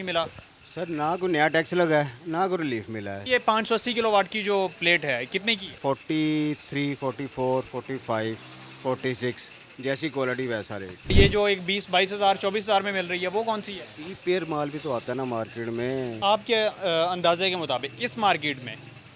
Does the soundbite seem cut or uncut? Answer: cut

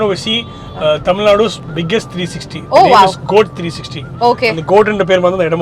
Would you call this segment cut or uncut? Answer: uncut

